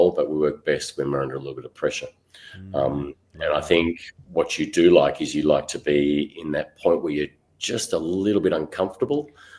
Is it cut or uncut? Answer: uncut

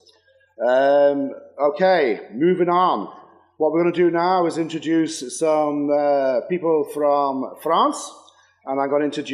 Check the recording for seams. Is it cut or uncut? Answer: cut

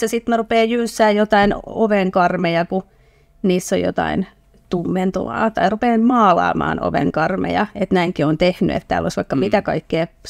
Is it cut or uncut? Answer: uncut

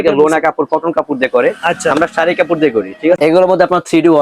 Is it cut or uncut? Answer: cut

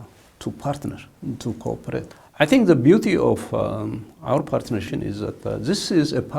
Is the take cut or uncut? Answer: cut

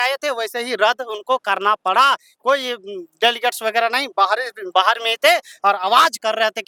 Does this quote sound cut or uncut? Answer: uncut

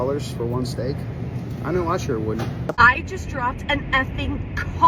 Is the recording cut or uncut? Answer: cut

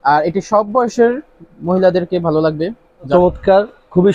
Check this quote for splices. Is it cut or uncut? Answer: cut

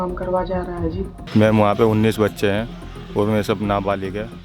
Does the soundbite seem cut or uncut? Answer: cut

